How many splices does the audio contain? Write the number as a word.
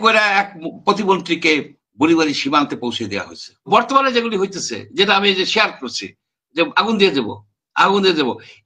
one